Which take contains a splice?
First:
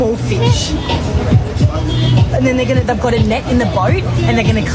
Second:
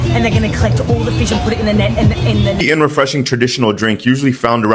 second; 1 cut; at 2.6 s

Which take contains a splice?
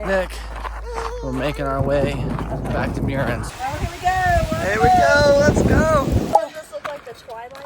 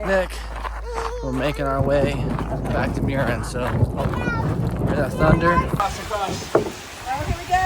first; 2 cuts; at 3.5 s, 6.3 s

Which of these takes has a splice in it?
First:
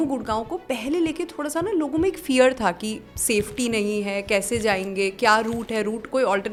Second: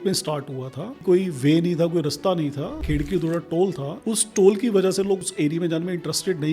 second; 4 cuts; at 1.0 s, 2.8 s, 3.9 s, 5.2 s

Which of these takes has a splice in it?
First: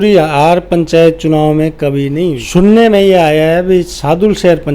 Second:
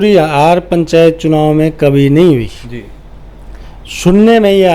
first; 1 cut; at 2.3 s

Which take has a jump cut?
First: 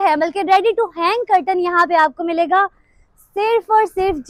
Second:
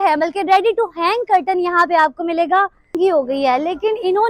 second; 1 cut; at 2.9 s

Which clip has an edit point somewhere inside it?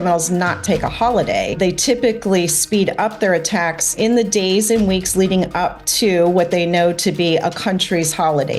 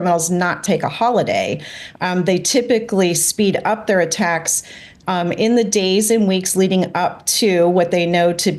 first; 2 cuts; at 1.6 s, 3.9 s

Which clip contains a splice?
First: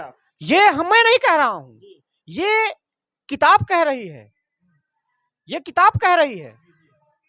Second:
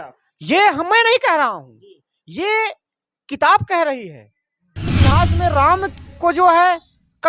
second; 1 cut; at 4.9 s

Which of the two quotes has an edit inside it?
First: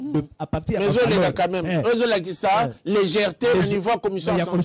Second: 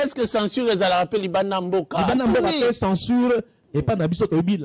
second; 1 cut; at 3.6 s

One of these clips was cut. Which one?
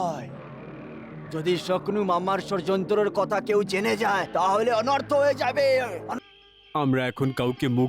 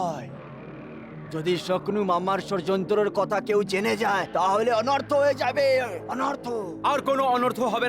first; 1 cut; at 6.1 s

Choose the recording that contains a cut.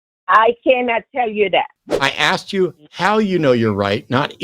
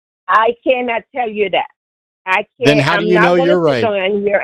first; 1 cut; at 1.8 s

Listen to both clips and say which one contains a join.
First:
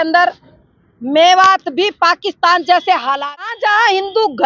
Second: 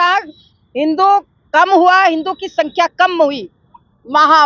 first; 1 cut; at 3.5 s

